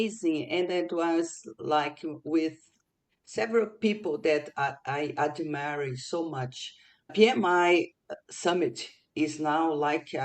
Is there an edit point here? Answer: yes; 2 cuts; at 7.1 s, 8.2 s

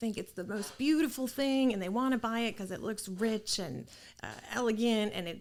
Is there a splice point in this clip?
no; 0 cuts

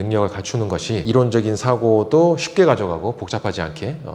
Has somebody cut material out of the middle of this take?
yes; 1 cut; at 1.0 s

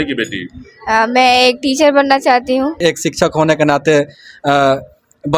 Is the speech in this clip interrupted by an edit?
yes; 1 cut; at 2.7 s

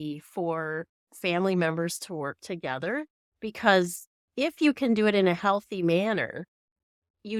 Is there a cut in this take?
no; 0 cuts

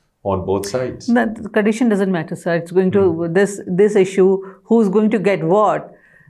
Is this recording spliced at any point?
no; 0 cuts

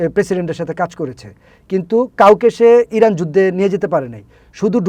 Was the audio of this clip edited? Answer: no; 0 cuts

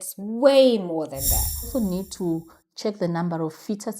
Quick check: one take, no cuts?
no; 1 cut; at 1.7 s

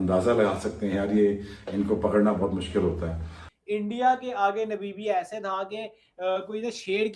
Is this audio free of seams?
no; 1 cut; at 3.5 s

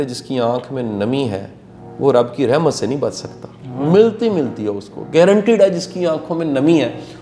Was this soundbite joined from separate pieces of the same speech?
no; 0 cuts

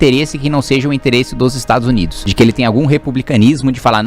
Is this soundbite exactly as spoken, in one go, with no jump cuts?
no; 1 cut; at 2.2 s

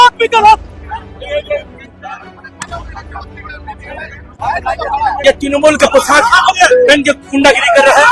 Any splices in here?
yes; 1 cut; at 5.2 s

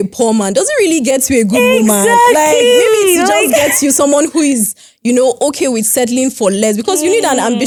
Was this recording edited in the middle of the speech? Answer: no; 0 cuts

